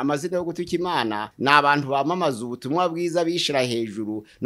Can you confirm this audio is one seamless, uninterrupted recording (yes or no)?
yes